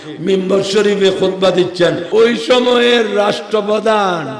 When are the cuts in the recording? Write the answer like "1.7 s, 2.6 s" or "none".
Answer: 2.0 s